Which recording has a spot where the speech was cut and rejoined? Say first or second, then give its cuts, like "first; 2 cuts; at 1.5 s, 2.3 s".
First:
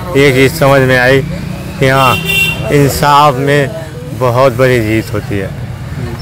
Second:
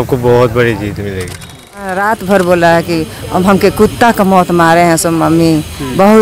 second; 1 cut; at 2.0 s